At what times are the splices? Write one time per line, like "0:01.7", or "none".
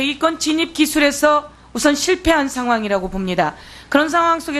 0:01.2